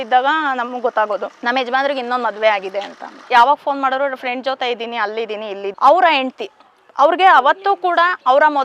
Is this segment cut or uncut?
cut